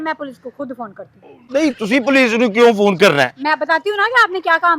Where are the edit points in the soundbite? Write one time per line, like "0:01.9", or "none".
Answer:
none